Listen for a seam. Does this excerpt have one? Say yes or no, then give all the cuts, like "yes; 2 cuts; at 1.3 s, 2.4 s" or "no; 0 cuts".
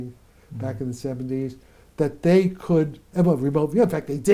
no; 0 cuts